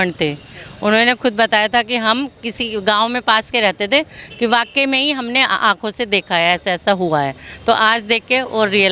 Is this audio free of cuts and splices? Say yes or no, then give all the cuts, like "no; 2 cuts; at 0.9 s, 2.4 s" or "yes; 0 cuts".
yes; 0 cuts